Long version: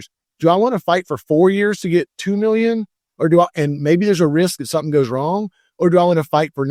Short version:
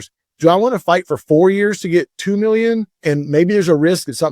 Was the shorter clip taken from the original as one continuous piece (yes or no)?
no